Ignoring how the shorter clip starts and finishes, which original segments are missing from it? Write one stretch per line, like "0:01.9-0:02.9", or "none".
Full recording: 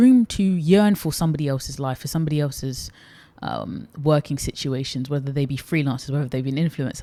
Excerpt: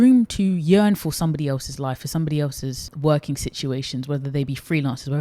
0:02.9-0:03.9